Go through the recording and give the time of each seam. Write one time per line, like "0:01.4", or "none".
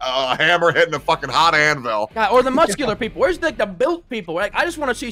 0:02.1